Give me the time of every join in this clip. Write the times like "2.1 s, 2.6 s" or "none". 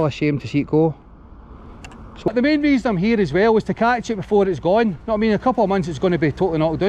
2.3 s